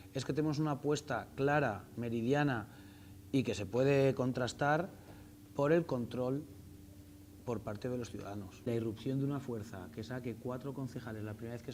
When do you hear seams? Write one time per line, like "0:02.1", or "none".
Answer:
0:08.7

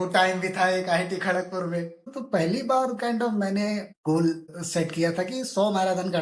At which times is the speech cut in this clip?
0:02.1
0:03.9
0:04.5

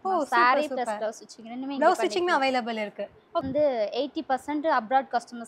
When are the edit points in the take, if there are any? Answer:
0:03.5

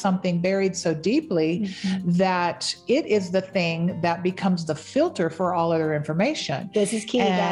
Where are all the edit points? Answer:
none

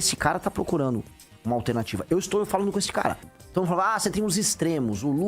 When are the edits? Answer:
0:03.3

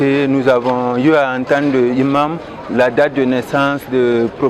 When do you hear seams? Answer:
none

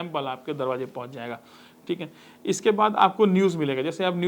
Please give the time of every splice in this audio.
none

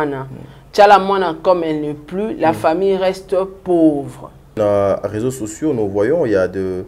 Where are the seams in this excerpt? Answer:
0:04.5

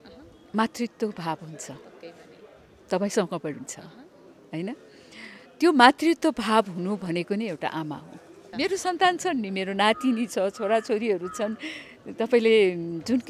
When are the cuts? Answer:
0:08.4

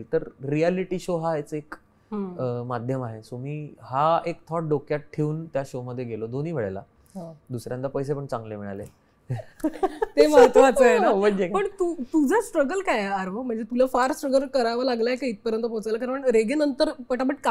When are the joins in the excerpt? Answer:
none

